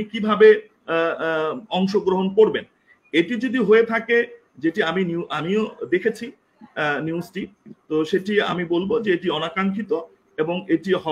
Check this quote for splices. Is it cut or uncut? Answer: uncut